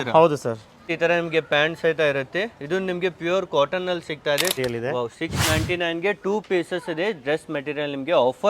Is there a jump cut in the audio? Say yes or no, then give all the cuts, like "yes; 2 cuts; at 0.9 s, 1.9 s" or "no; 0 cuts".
yes; 2 cuts; at 0.9 s, 4.6 s